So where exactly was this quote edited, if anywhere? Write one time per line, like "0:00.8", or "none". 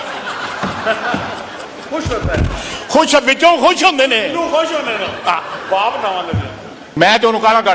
0:06.8